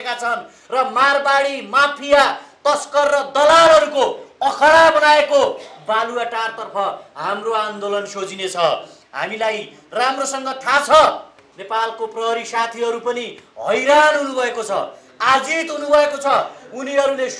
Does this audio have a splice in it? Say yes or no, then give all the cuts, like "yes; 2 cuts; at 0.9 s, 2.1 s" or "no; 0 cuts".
no; 0 cuts